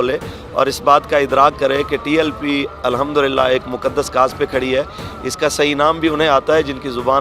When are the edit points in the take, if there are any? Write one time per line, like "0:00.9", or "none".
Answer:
none